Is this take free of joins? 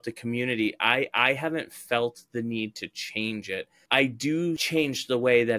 no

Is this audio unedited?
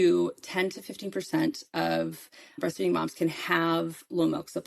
yes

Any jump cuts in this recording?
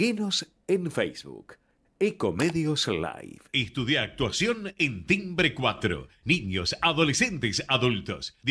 yes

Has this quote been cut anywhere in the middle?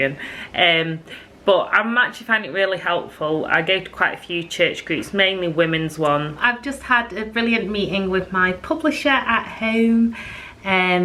yes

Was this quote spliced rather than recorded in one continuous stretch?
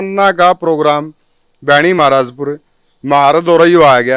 no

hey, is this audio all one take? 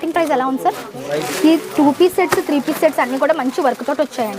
no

